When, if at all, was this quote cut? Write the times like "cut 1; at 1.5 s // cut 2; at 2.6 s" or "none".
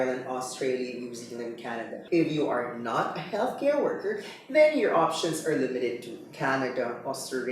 cut 1; at 2.0 s